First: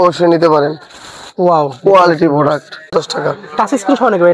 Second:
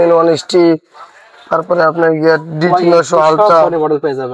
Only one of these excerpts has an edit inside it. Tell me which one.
first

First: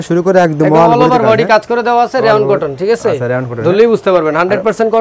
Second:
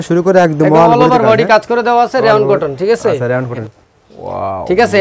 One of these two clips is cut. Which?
second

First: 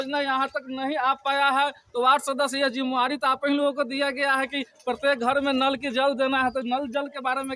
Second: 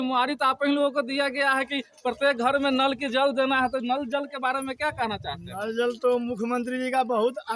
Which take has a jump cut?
first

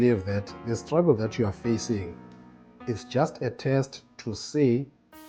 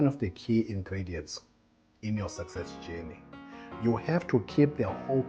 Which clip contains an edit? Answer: second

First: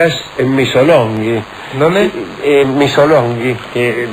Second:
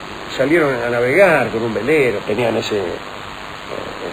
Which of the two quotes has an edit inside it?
second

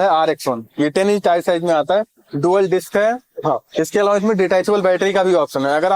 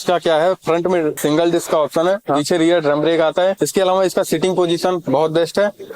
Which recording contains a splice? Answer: second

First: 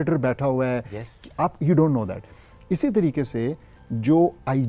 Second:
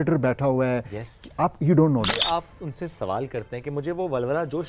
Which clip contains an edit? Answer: second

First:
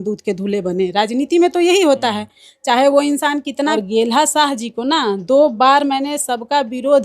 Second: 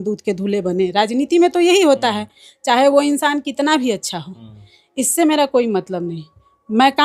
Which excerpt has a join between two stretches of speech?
first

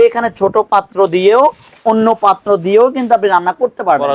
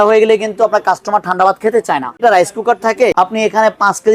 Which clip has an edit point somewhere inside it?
second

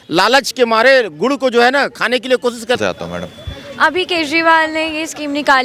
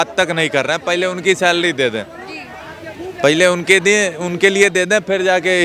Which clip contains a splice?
first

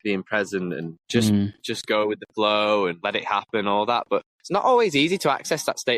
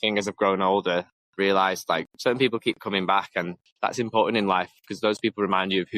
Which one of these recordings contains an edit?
second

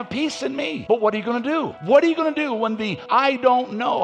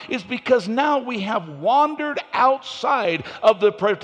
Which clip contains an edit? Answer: first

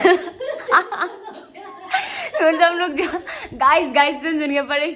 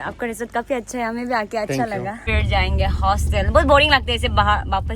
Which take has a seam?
second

